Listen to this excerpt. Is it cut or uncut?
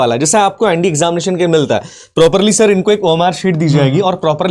uncut